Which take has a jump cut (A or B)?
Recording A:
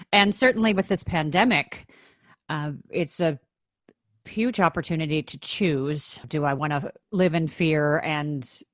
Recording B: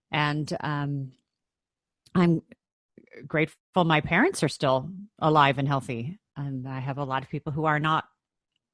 A